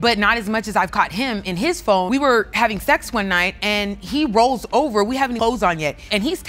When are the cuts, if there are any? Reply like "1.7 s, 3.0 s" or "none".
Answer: none